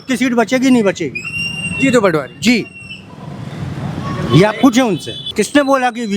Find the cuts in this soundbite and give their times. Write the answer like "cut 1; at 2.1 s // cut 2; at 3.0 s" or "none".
cut 1; at 5.2 s

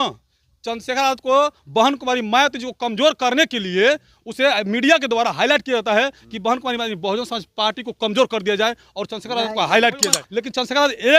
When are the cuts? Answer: cut 1; at 10.2 s

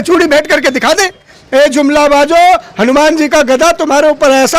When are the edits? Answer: cut 1; at 1.3 s

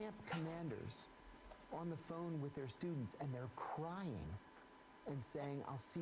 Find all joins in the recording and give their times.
none

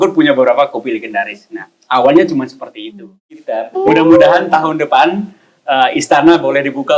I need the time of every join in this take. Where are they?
cut 1; at 3.6 s

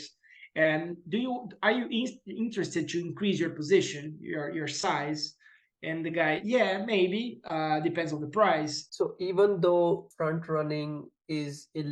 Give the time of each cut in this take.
cut 1; at 8.8 s // cut 2; at 10.1 s

